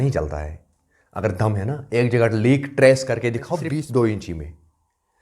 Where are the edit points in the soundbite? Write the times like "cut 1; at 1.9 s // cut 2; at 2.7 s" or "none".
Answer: cut 1; at 3.6 s